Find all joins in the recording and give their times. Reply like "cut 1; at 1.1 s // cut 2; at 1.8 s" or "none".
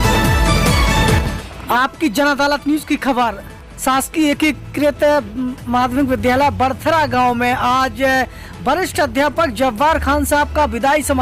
cut 1; at 1.2 s